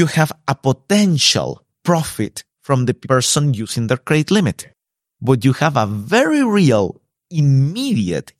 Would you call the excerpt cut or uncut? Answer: cut